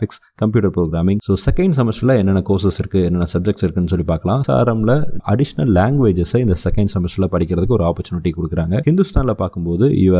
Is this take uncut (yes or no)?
no